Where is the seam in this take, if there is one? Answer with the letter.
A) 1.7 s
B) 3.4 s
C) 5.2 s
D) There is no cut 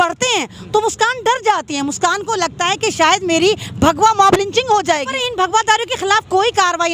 C